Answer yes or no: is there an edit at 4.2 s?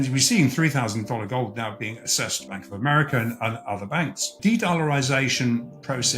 yes